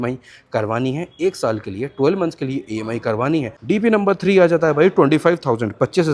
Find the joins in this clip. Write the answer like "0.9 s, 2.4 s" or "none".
3.5 s